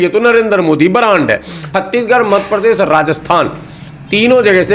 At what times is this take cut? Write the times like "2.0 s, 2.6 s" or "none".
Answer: 1.6 s